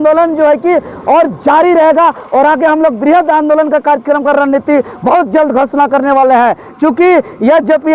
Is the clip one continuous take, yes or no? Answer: yes